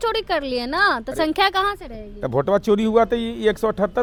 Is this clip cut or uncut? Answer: uncut